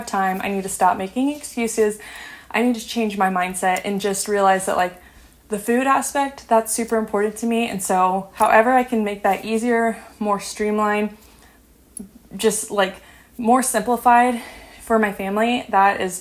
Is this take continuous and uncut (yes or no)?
yes